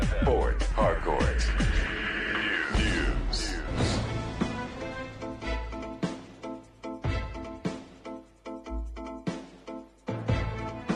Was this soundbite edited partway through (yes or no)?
no